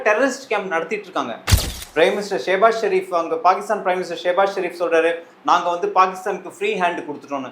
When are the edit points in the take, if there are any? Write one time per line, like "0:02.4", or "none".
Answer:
0:01.7